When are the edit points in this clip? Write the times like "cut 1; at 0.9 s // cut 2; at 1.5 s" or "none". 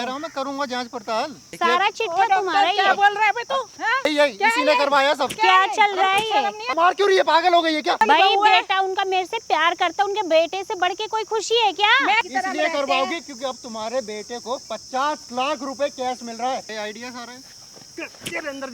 cut 1; at 1.4 s // cut 2; at 4.1 s // cut 3; at 6.7 s // cut 4; at 8.0 s // cut 5; at 12.3 s // cut 6; at 16.7 s